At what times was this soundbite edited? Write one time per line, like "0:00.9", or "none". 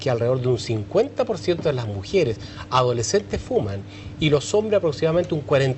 none